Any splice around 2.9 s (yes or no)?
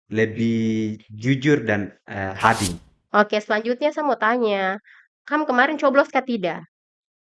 yes